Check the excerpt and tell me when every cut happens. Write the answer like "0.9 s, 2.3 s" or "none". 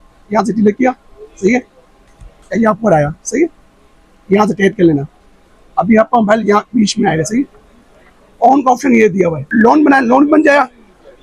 9.4 s